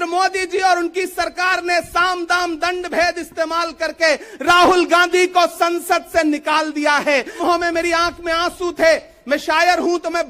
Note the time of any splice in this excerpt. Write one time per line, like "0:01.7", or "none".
0:07.4

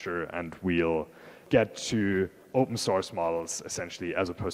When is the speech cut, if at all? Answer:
0:01.4

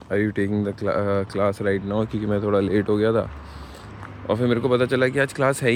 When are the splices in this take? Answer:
none

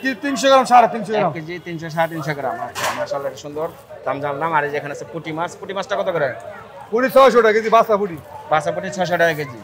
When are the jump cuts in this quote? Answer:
none

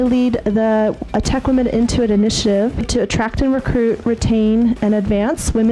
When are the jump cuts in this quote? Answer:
0:02.8

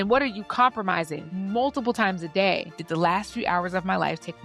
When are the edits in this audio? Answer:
0:01.2
0:02.7

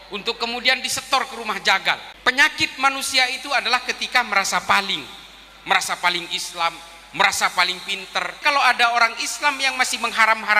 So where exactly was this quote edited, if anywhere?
0:02.1
0:08.4

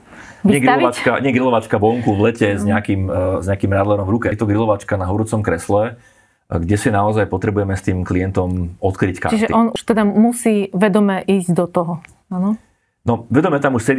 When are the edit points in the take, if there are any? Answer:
0:04.4
0:09.7

